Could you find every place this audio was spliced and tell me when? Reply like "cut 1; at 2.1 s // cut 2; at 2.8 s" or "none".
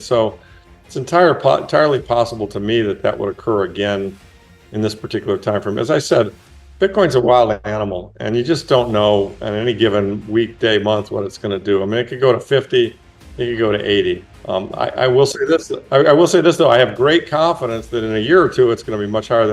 cut 1; at 14.3 s